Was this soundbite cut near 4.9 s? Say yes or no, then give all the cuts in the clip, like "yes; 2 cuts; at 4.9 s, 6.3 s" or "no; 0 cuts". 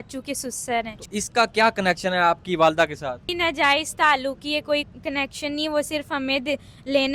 yes; 3 cuts; at 1.0 s, 3.3 s, 4.9 s